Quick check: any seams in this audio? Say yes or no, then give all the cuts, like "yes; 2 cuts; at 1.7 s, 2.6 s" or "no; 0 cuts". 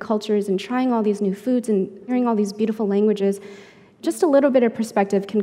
yes; 2 cuts; at 2.1 s, 3.9 s